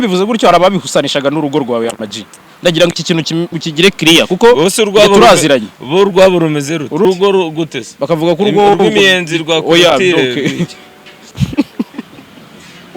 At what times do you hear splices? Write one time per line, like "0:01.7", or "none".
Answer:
0:07.0